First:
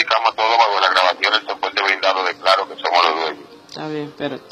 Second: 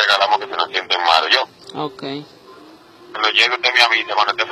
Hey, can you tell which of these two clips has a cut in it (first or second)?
first